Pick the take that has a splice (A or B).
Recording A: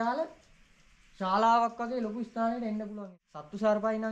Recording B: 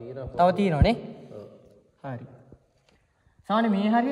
A